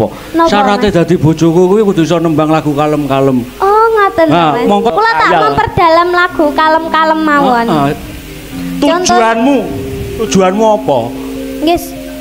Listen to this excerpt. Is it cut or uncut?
cut